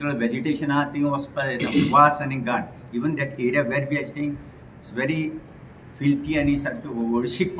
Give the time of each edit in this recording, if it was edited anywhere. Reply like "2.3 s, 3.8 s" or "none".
none